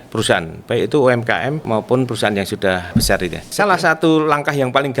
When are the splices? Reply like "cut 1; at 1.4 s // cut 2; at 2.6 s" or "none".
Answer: cut 1; at 1.6 s // cut 2; at 3.3 s

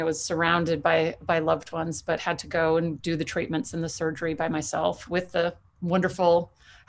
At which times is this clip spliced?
none

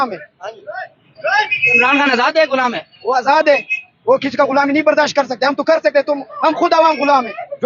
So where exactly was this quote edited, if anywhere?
none

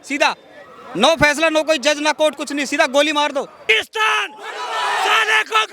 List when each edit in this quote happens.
cut 1; at 3.6 s

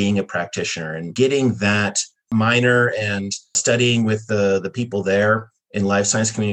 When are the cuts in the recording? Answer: cut 1; at 1.1 s // cut 2; at 2.3 s // cut 3; at 3.6 s

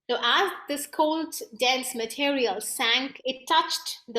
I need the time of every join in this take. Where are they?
cut 1; at 3.1 s

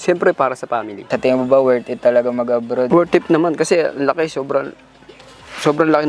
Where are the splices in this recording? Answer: cut 1; at 1.0 s // cut 2; at 2.9 s

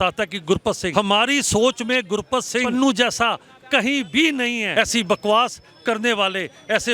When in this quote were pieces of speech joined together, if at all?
cut 1; at 0.9 s // cut 2; at 2.7 s // cut 3; at 4.7 s

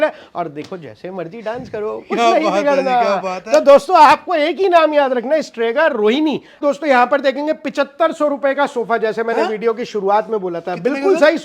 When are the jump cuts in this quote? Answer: cut 1; at 6.6 s

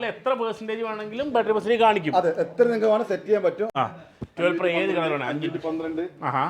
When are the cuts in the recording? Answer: cut 1; at 3.7 s

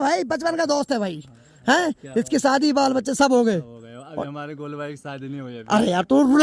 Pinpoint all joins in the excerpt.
none

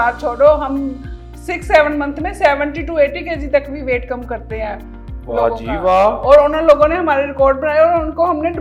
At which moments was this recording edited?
none

